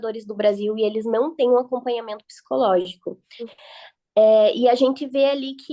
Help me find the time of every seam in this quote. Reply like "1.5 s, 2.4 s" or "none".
3.5 s